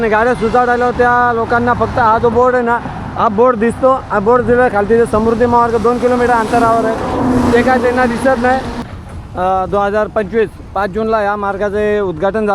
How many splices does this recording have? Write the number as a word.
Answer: one